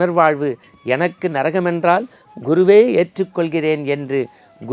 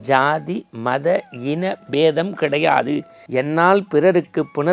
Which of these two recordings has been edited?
second; 1 cut; at 3.2 s

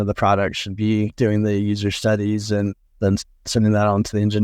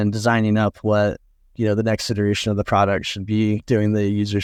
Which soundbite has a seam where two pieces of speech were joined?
first; 1 cut; at 2.8 s

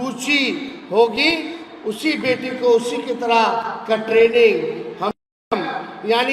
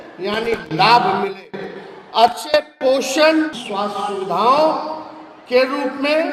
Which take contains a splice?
first; 1 cut; at 5.3 s

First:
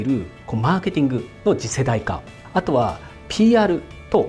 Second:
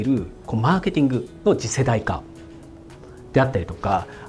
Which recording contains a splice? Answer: first; 1 cut; at 2.4 s

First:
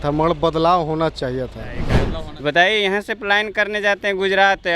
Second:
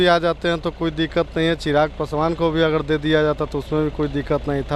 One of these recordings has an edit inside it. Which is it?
first; 1 cut; at 1.9 s

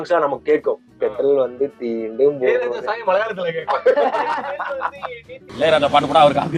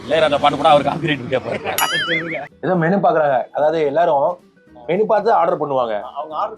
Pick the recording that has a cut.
second; 1 cut; at 2.5 s

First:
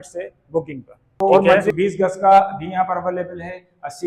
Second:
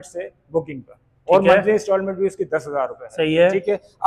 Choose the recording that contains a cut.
first; 1 cut; at 1.7 s

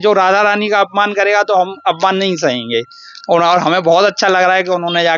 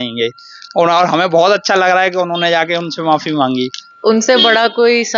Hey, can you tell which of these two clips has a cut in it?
second; 1 cut; at 3.8 s

